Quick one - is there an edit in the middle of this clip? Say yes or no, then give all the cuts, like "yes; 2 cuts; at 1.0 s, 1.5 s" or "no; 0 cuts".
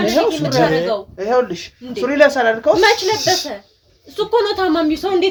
no; 0 cuts